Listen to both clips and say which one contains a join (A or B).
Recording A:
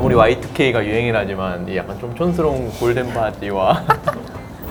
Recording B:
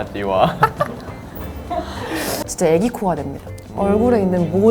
B